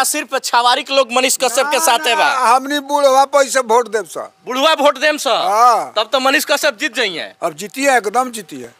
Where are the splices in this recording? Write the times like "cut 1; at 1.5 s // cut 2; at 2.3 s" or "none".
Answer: none